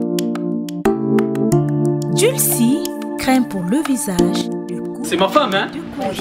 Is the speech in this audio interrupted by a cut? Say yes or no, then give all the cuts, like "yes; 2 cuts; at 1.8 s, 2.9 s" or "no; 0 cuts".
yes; 1 cut; at 1.0 s